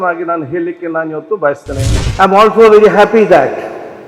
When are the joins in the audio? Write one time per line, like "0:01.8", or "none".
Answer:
0:02.0